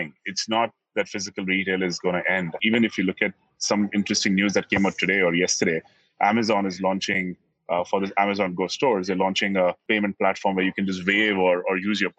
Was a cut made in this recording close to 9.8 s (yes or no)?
yes